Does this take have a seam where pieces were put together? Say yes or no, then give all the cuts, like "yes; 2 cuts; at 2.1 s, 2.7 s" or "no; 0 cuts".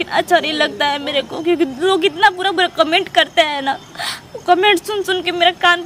no; 0 cuts